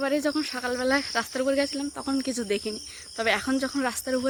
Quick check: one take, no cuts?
yes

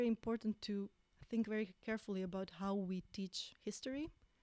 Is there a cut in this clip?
yes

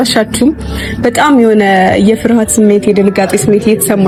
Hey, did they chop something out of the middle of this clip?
no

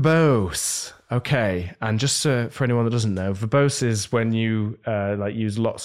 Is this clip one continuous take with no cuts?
yes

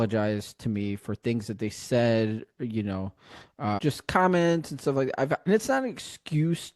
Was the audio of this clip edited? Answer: yes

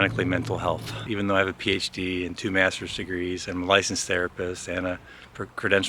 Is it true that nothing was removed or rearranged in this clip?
no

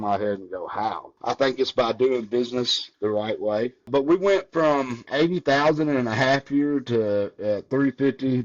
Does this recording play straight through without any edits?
no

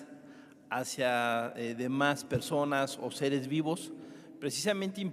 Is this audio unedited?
yes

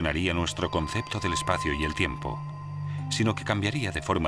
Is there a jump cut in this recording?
yes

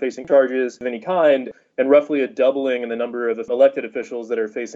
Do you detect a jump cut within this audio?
no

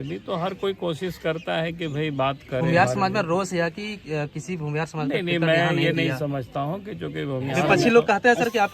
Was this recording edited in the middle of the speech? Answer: yes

